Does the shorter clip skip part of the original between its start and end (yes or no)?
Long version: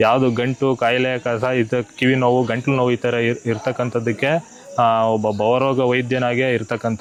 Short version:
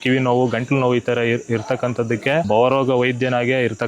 yes